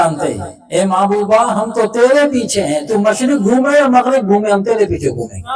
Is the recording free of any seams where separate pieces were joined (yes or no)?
yes